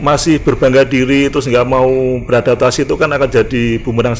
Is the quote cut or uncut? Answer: uncut